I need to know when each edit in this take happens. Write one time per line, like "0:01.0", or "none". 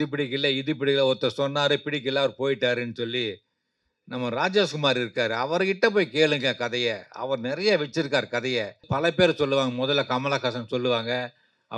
0:08.9